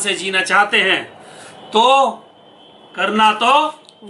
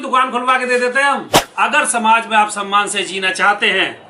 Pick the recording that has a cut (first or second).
second